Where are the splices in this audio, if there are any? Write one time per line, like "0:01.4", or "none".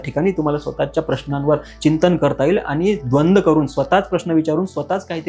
none